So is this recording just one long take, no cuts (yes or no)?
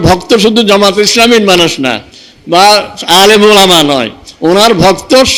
yes